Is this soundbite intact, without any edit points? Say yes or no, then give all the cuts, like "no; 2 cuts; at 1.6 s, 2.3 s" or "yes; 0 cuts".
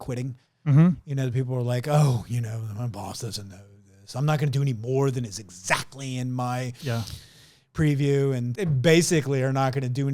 no; 1 cut; at 8.5 s